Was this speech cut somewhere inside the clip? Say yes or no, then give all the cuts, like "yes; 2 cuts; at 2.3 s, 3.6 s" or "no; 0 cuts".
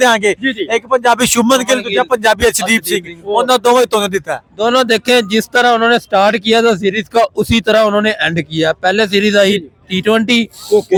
no; 0 cuts